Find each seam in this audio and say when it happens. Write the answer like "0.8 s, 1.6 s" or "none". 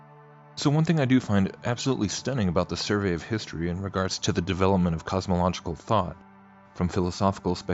5.0 s